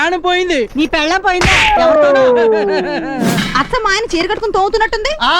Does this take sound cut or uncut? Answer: cut